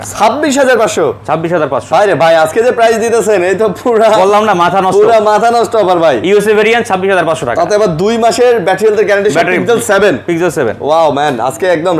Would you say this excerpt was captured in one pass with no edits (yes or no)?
yes